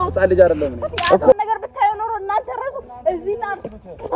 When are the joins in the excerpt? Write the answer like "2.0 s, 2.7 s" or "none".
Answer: 1.3 s